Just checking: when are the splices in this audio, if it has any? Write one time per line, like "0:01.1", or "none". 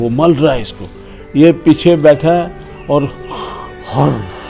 none